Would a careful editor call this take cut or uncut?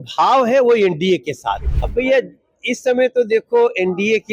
cut